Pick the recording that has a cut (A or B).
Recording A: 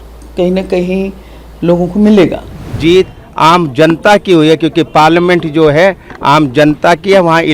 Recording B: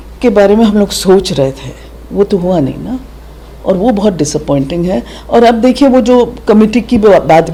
A